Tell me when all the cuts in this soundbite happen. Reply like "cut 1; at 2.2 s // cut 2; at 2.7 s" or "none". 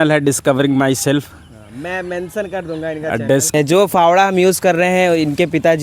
cut 1; at 3.5 s